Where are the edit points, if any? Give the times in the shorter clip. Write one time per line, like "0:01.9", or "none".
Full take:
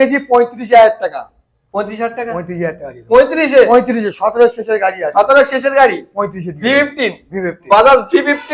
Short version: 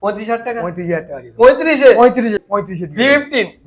0:02.4